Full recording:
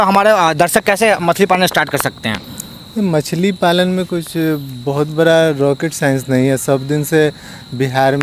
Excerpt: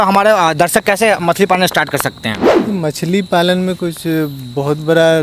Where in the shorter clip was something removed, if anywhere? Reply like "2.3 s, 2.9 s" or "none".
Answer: 2.5 s